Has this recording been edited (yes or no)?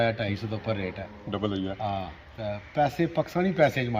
no